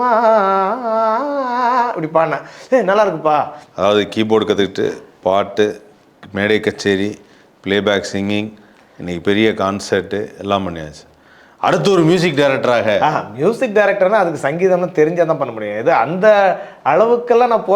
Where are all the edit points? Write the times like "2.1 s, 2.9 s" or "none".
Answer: 3.6 s